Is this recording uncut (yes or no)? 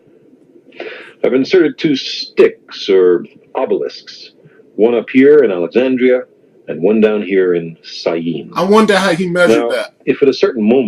no